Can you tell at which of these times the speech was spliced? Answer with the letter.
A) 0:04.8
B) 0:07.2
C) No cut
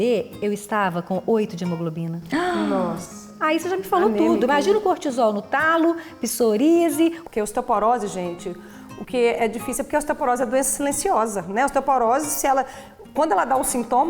B